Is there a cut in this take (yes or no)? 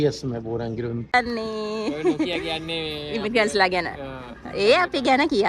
yes